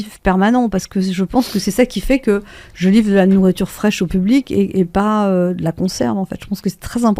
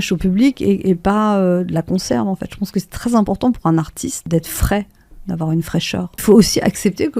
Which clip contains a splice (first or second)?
second